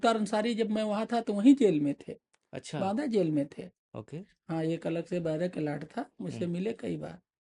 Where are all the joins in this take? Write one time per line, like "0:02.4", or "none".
none

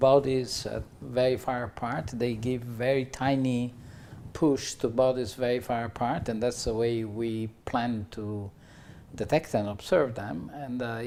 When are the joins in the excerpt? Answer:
none

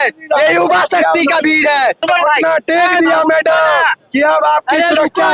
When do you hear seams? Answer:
0:02.0

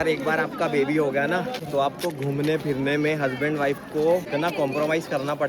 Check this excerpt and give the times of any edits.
0:01.6
0:04.3

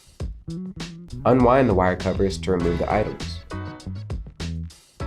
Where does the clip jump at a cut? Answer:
0:01.2
0:03.2

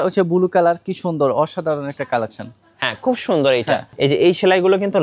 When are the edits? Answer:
0:03.9

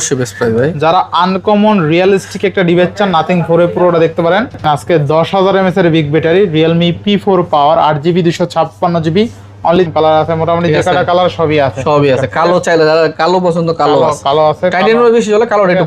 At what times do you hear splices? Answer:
0:04.6
0:09.8

